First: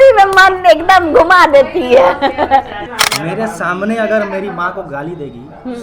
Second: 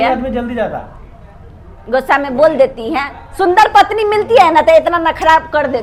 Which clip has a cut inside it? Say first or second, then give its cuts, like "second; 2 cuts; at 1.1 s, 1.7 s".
first; 1 cut; at 2.9 s